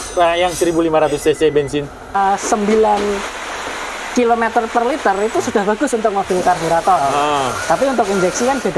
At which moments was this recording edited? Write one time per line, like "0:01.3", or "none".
0:02.2